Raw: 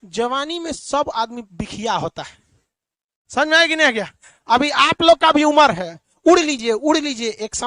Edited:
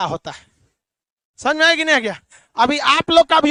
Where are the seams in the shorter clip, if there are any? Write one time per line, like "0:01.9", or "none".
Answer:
none